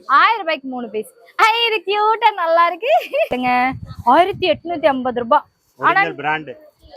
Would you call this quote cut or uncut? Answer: cut